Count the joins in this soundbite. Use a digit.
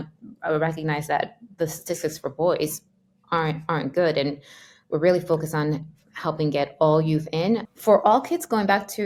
0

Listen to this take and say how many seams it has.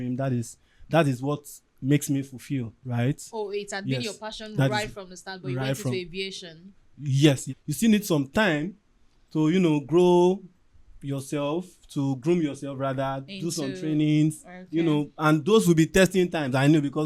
1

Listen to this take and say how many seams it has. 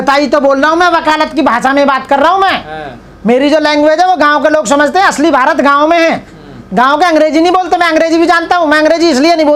0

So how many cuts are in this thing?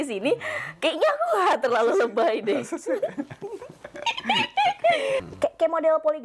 1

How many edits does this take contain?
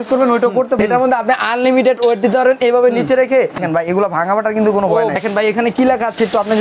2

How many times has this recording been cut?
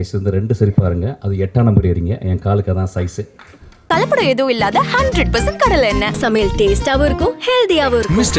1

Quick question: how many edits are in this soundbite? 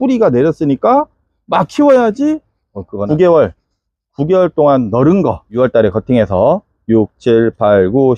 1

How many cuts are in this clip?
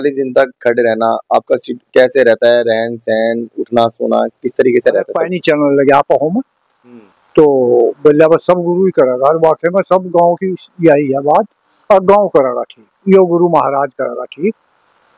1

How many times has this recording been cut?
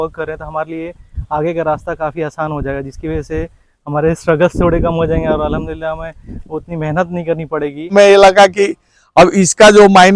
1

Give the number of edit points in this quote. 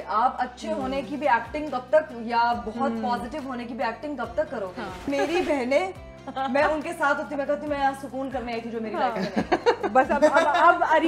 1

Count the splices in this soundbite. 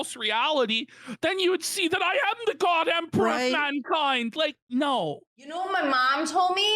1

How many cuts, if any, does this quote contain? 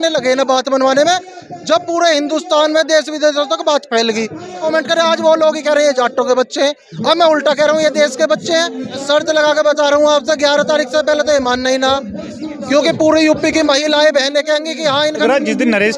3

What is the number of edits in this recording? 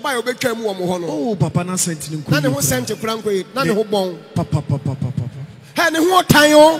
0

